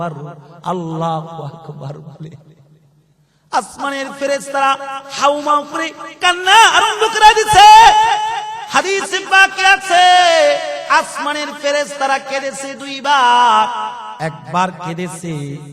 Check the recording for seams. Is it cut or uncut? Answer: cut